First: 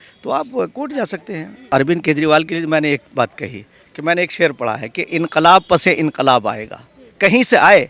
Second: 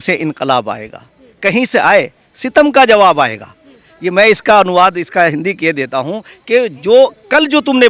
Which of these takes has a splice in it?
first; 1 cut; at 1.7 s

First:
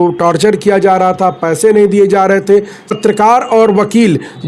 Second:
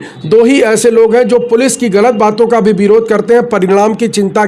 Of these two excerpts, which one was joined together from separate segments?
first; 1 cut; at 2.9 s

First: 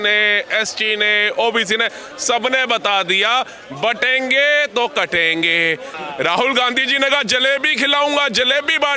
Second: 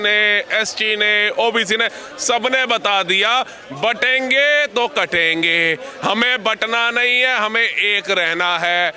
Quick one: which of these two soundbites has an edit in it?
first; 1 cut; at 5.9 s

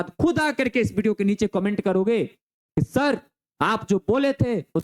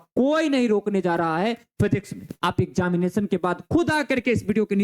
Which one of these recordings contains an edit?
second; 1 cut; at 2.3 s

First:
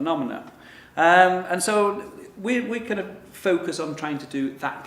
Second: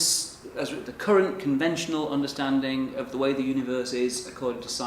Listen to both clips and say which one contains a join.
first; 1 cut; at 1.6 s

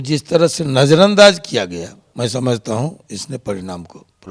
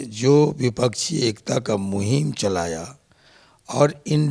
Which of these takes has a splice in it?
first; 1 cut; at 2.0 s

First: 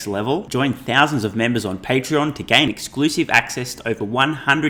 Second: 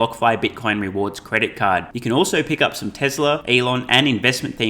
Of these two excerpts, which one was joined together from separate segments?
second; 1 cut; at 3.4 s

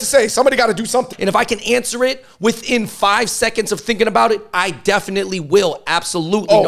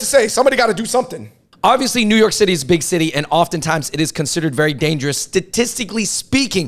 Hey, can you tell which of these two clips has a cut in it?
first; 1 cut; at 1.1 s

